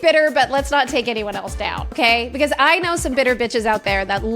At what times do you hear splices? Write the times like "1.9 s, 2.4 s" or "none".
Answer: 1.9 s